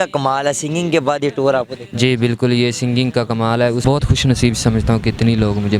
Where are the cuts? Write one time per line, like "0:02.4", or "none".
0:03.8